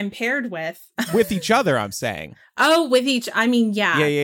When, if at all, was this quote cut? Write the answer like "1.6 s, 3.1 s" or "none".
1.1 s